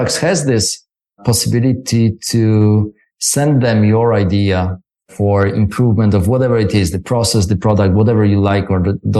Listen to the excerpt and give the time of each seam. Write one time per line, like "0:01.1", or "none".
none